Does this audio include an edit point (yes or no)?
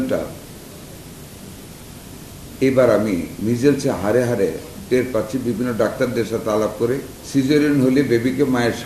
yes